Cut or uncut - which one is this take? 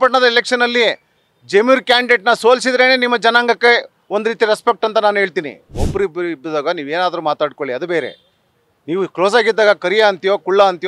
cut